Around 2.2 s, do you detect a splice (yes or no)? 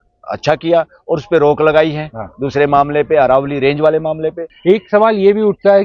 no